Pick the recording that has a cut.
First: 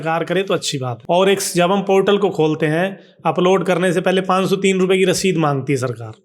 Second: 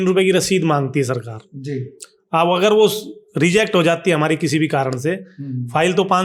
first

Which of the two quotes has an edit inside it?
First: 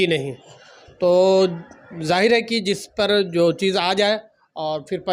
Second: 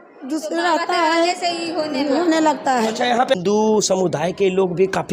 second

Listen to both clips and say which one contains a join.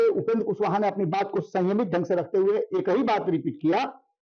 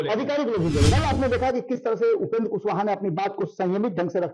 second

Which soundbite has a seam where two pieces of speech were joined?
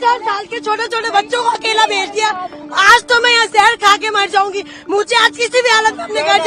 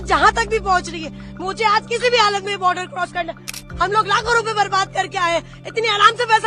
second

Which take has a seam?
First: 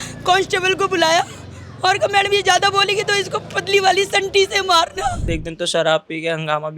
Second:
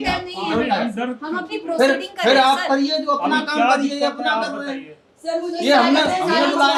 first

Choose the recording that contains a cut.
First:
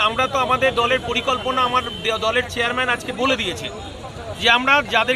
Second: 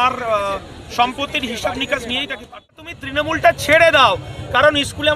second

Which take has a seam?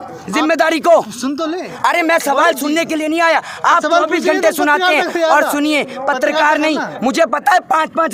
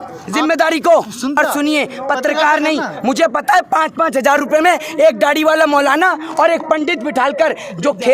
second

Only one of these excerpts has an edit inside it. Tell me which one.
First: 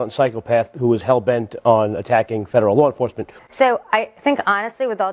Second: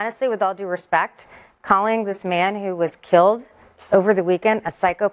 first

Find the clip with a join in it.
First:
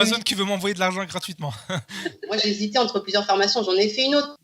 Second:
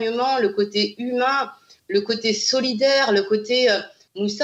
first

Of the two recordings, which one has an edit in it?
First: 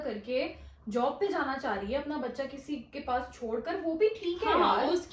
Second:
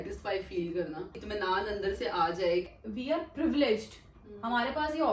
second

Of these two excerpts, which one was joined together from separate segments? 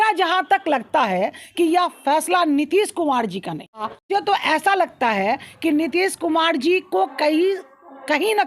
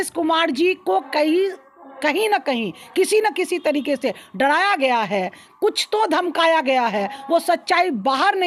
first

